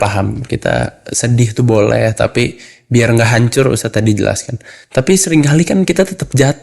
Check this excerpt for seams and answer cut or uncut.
uncut